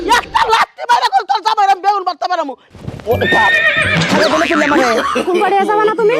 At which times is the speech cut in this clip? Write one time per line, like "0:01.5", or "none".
0:02.5